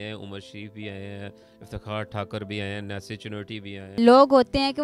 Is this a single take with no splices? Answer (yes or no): no